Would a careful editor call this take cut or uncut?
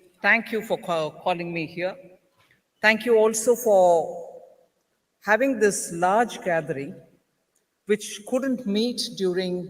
cut